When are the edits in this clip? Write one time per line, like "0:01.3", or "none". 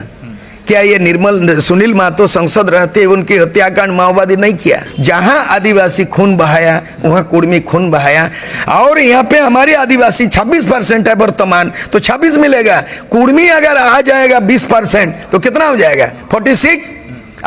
0:04.9
0:08.4